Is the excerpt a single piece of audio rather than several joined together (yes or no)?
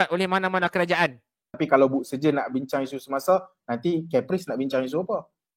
no